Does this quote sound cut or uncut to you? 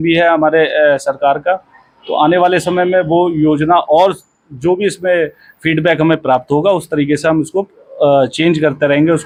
uncut